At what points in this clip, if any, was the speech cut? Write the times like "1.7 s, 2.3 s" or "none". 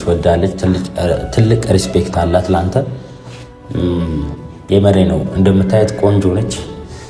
none